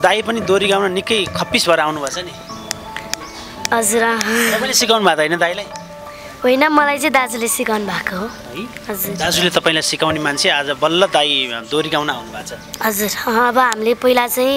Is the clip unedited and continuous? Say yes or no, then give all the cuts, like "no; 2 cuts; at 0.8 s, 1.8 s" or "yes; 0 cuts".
yes; 0 cuts